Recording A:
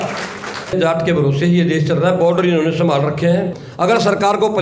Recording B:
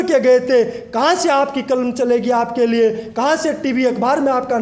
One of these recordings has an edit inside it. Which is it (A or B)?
A